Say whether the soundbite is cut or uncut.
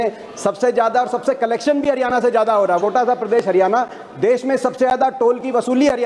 cut